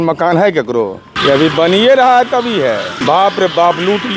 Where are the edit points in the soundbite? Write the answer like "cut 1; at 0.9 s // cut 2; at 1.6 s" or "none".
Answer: cut 1; at 1.1 s // cut 2; at 2.9 s